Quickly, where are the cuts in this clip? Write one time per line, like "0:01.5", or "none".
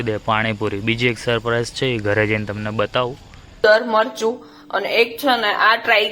0:03.6